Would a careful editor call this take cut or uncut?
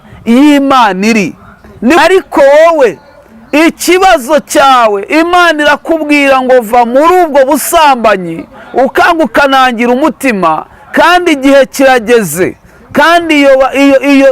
cut